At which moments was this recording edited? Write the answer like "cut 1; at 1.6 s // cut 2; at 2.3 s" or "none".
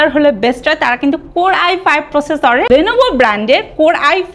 cut 1; at 2.7 s